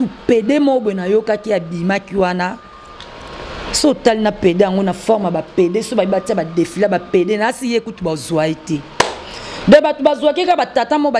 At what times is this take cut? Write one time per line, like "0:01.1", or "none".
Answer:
none